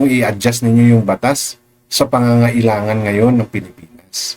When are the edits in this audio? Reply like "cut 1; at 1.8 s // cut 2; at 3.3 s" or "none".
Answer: none